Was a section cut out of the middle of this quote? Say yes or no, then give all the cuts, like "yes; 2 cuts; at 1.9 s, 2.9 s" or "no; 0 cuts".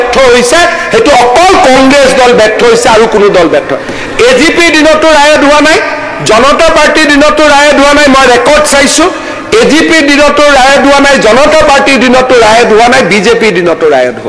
no; 0 cuts